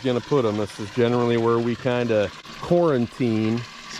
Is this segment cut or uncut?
cut